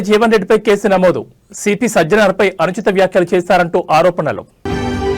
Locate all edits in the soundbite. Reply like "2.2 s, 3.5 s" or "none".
none